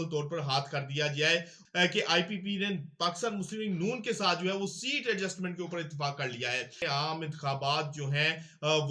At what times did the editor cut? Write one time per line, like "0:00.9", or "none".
0:01.6
0:06.8